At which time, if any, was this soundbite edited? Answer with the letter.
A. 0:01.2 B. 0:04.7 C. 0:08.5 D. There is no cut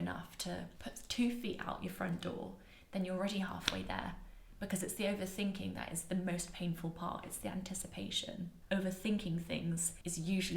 C